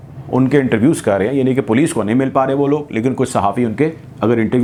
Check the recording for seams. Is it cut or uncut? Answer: uncut